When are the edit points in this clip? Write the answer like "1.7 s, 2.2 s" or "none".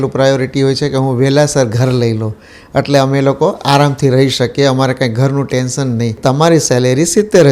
6.2 s